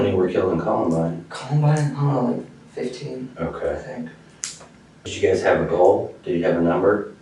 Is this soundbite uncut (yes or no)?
no